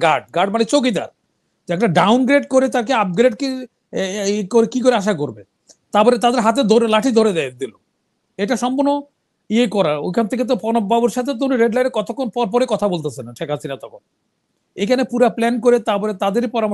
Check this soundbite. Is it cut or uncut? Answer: uncut